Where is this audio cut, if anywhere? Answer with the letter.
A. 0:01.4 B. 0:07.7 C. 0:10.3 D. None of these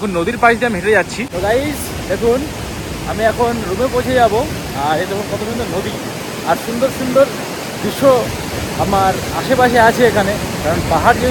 D